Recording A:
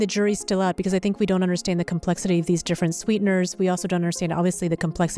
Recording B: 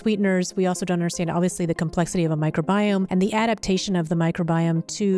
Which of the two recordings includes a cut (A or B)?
B